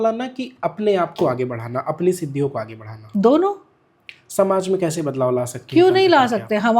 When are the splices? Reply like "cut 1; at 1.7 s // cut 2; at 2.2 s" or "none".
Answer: none